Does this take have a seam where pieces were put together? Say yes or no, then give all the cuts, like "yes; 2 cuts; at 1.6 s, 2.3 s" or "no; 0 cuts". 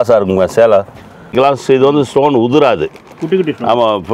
yes; 1 cut; at 1.3 s